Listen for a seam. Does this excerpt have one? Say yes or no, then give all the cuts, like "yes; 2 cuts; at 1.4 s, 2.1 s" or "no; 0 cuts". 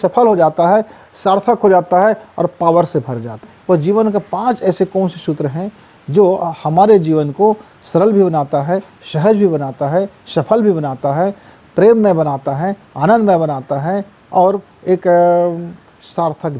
yes; 1 cut; at 3.5 s